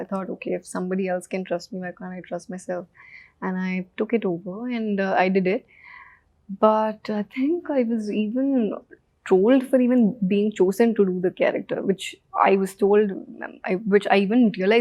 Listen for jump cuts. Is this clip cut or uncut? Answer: uncut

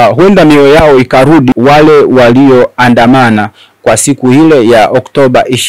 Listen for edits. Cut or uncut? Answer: cut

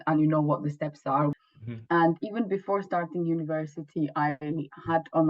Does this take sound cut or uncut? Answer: cut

